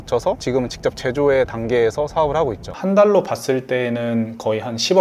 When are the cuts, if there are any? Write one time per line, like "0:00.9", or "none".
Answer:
0:02.7